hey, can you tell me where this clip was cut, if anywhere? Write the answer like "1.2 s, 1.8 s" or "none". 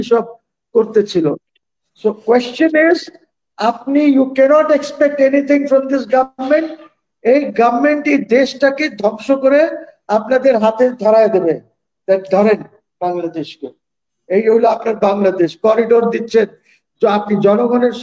none